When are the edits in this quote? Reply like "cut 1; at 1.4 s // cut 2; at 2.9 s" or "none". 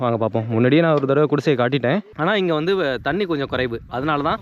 cut 1; at 2.1 s

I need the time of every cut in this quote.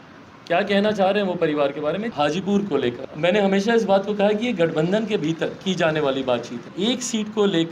cut 1; at 2.1 s // cut 2; at 3.1 s // cut 3; at 6.6 s

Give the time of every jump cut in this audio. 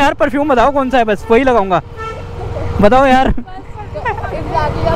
none

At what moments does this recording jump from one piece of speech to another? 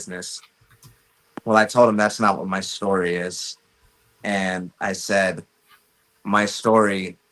none

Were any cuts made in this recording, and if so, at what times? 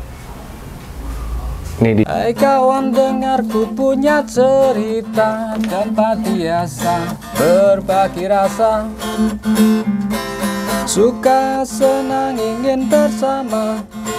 cut 1; at 2.1 s

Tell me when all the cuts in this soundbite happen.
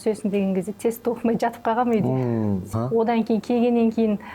cut 1; at 2.7 s

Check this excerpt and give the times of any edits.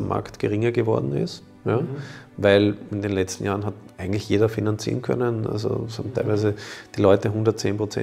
none

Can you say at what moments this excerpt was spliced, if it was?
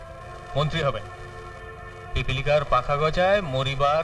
cut 1; at 2.0 s

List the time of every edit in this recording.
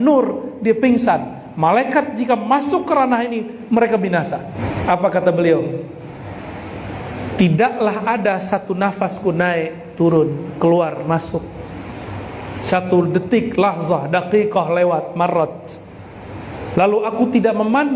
cut 1; at 4.6 s

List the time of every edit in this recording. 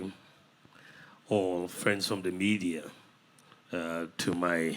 cut 1; at 1.7 s

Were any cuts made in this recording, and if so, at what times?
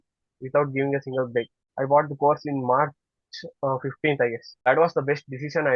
cut 1; at 1.6 s // cut 2; at 4.6 s

